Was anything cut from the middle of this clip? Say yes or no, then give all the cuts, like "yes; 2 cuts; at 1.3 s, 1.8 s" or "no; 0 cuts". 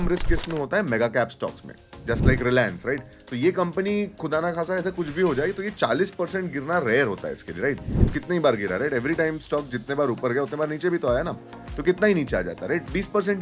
yes; 1 cut; at 8.1 s